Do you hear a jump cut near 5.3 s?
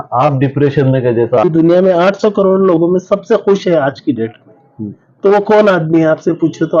no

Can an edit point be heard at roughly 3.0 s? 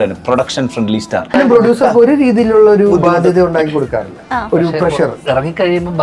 no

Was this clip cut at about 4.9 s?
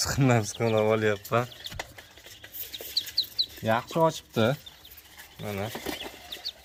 no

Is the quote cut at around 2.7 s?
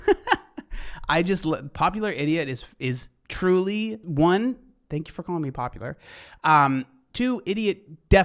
no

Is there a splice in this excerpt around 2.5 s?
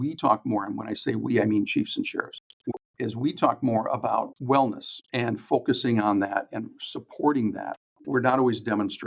no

